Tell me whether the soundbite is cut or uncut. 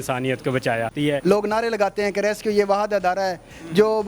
cut